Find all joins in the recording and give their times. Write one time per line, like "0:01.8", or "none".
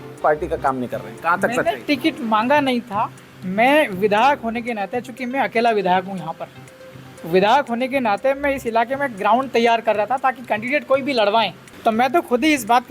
0:11.6